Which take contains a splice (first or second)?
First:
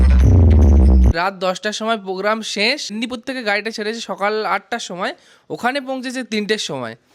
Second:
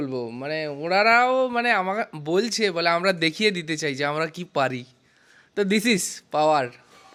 first